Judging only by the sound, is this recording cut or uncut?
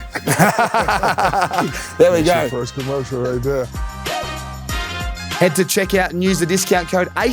cut